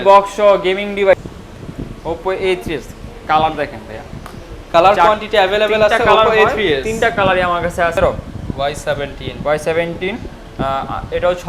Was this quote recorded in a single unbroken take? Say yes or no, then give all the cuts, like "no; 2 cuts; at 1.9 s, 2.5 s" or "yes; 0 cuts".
no; 2 cuts; at 1.1 s, 7.9 s